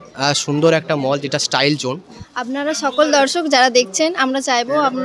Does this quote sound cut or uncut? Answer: cut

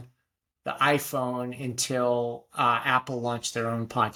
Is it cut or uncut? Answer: uncut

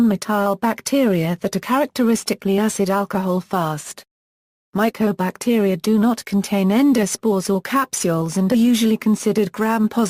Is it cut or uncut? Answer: cut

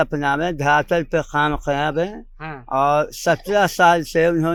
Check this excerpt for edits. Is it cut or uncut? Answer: uncut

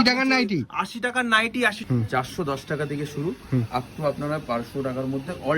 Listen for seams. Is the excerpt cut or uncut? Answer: cut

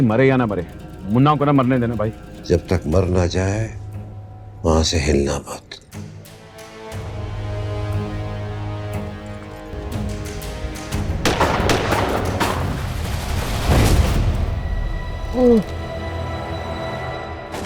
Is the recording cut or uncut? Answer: uncut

